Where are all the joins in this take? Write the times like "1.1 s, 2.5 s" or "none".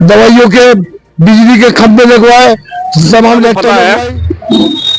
3.8 s